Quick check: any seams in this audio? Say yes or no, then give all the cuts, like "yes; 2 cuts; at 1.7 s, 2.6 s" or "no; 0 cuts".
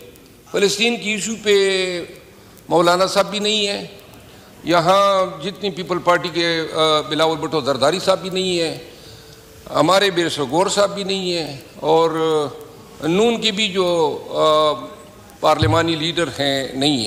no; 0 cuts